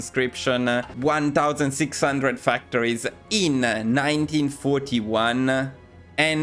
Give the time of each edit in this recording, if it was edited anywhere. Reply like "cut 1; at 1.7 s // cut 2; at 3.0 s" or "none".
cut 1; at 0.9 s